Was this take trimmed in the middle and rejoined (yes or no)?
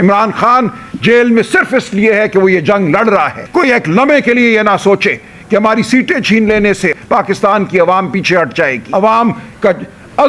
yes